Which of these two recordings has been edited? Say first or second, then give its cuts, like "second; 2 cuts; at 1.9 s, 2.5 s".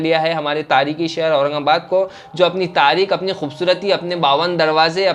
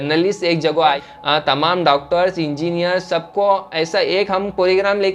second; 1 cut; at 1.0 s